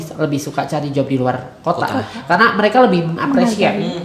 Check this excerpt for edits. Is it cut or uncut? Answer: uncut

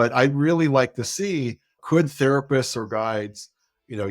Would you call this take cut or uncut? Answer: cut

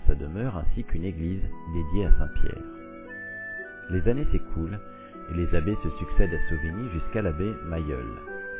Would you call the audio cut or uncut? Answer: uncut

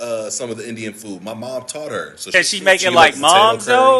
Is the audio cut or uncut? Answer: cut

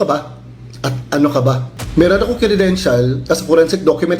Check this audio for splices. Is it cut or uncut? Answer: cut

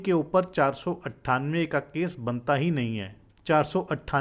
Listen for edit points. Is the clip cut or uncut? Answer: uncut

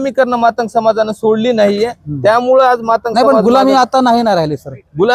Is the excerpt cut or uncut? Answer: uncut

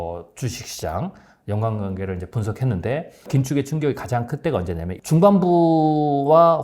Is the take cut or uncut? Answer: cut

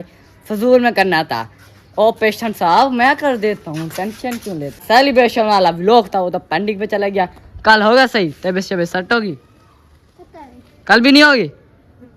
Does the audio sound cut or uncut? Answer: cut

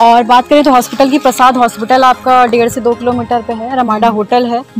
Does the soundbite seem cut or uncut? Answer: uncut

